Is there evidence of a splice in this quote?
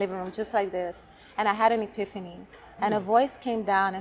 no; 0 cuts

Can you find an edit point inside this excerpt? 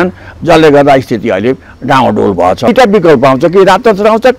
yes; 1 cut; at 2.7 s

